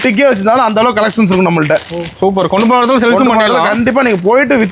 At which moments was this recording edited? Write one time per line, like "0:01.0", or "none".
none